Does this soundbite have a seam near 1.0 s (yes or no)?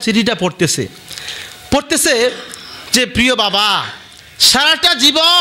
no